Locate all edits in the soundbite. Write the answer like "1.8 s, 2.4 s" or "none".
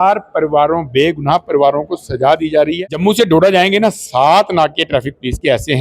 2.8 s

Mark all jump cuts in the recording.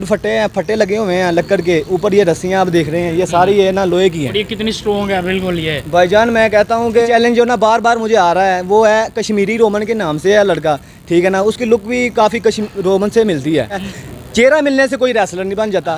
7.1 s, 13.8 s

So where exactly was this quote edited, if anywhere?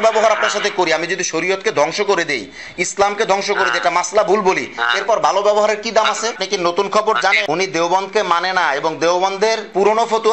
6.4 s

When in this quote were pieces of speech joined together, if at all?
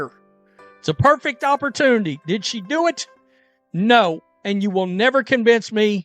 4.9 s

